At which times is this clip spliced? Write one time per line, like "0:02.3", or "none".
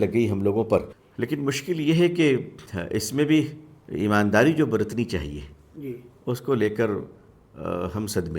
0:01.0